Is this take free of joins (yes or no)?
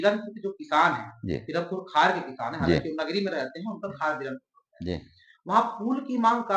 yes